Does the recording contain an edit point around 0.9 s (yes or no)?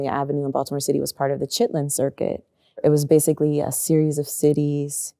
no